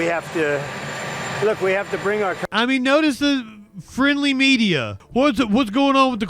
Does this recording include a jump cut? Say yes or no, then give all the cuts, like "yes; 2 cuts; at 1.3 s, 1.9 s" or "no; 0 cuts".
yes; 1 cut; at 5.0 s